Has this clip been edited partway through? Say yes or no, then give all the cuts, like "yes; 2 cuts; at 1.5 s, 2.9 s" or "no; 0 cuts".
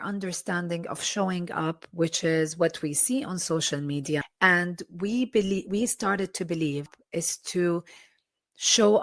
yes; 2 cuts; at 4.3 s, 7.0 s